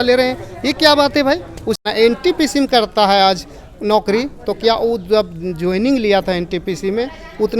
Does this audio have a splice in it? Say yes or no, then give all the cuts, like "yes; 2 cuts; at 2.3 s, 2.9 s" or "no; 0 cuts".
yes; 1 cut; at 1.8 s